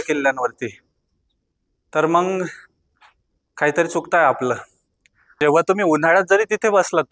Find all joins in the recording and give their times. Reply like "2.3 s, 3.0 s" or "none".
5.4 s

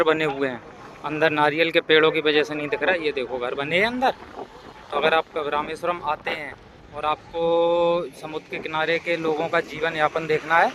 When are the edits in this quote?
none

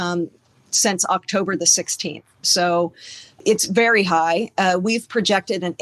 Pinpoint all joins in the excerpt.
3.4 s

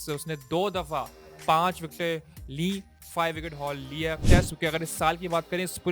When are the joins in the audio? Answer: 4.2 s

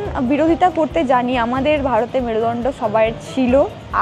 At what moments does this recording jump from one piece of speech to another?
none

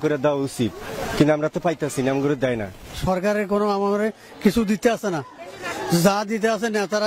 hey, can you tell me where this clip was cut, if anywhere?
none

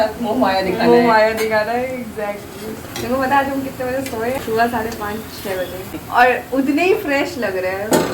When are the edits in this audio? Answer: 2.9 s, 4.4 s, 6.0 s

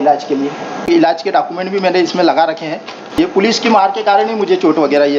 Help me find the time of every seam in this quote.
0.9 s, 3.2 s

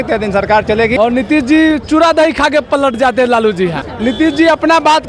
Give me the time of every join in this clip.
0.9 s, 3.9 s

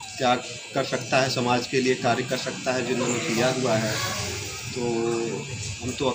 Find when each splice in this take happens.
none

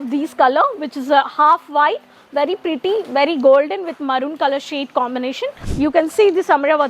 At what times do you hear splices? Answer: 5.6 s

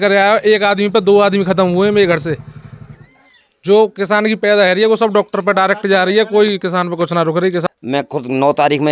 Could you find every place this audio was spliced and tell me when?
7.6 s

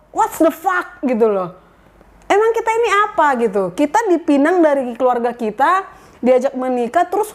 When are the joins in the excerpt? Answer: none

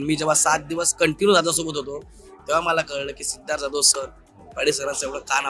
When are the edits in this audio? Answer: none

